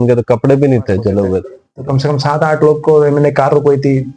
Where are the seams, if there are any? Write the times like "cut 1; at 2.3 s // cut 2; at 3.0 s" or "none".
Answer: cut 1; at 1.7 s